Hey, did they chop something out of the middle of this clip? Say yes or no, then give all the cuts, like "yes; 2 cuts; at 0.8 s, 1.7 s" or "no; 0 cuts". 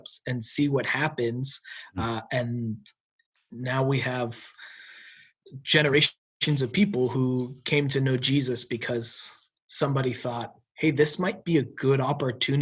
yes; 1 cut; at 6.2 s